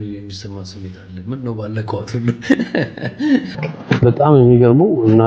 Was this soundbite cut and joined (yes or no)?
yes